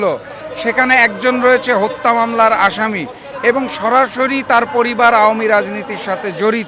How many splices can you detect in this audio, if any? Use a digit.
0